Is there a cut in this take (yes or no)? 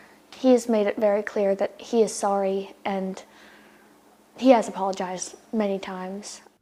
no